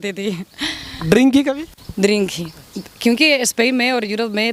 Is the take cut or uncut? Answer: uncut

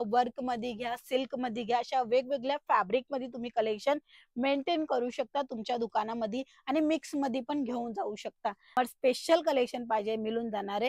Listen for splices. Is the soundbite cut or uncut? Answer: cut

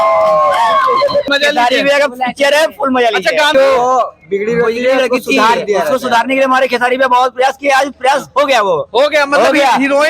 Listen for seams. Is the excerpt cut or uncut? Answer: cut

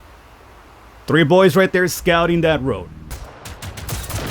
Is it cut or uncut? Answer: cut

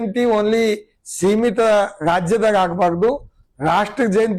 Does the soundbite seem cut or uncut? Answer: uncut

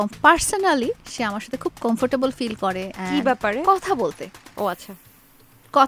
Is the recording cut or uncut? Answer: uncut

